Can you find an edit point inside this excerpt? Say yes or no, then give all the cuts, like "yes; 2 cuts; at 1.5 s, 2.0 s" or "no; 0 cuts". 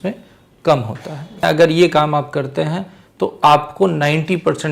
yes; 1 cut; at 1.4 s